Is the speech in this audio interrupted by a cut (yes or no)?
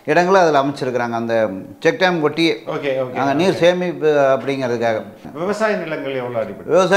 yes